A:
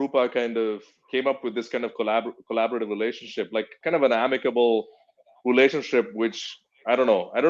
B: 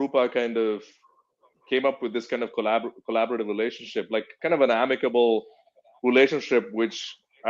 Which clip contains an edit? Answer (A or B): A